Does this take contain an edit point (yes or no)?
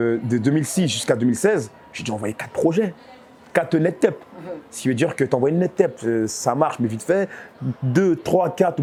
no